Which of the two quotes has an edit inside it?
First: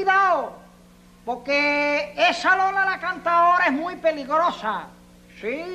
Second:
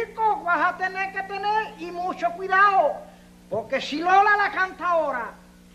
second; 1 cut; at 4.6 s

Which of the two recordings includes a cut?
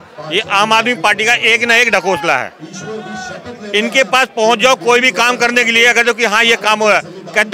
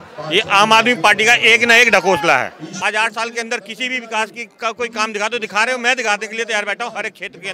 second; 1 cut; at 2.6 s

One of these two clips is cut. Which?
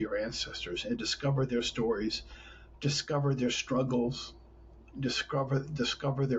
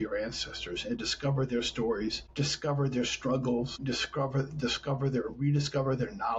second; 2 cuts; at 2.2 s, 3.8 s

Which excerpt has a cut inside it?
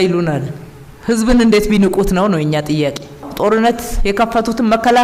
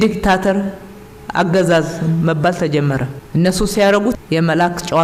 first; 1 cut; at 3.3 s

